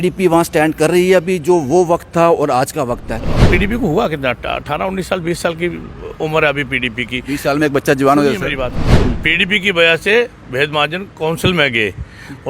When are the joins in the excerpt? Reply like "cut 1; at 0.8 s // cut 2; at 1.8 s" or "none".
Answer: cut 1; at 3.3 s // cut 2; at 8.9 s